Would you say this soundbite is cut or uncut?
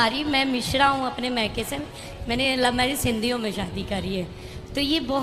uncut